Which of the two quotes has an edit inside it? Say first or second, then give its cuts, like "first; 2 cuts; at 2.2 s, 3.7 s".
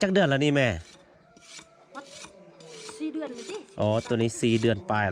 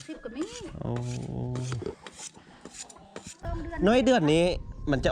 second; 1 cut; at 3.6 s